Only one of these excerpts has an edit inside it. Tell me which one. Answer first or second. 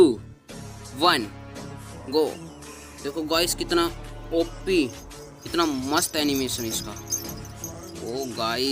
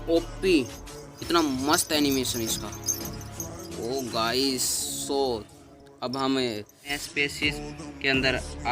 second